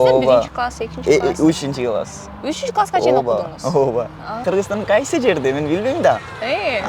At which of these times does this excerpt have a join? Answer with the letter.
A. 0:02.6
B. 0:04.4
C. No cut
B